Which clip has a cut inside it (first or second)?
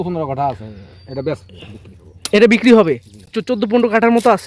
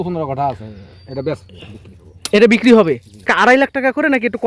second